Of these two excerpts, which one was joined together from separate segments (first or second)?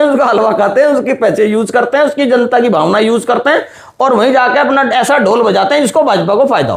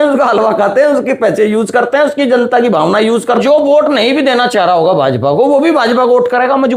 second